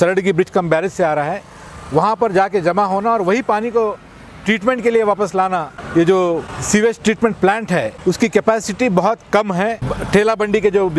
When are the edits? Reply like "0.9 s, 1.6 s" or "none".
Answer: 5.8 s, 6.5 s, 7.9 s, 9.9 s